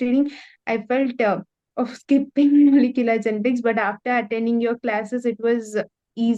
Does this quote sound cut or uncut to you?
uncut